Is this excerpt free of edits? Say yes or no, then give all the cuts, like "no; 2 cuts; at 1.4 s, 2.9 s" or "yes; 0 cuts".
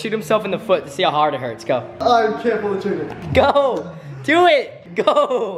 no; 2 cuts; at 1.9 s, 3.2 s